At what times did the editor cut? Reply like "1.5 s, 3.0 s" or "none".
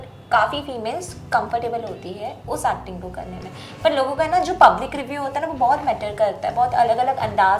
none